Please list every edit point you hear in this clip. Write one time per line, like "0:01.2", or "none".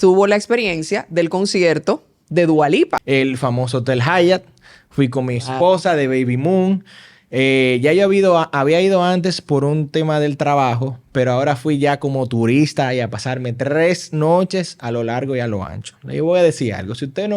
0:03.0